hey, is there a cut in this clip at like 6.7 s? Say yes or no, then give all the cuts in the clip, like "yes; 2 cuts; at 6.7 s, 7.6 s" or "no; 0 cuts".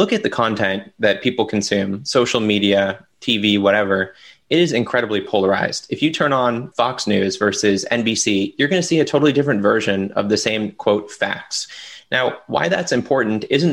yes; 1 cut; at 6.7 s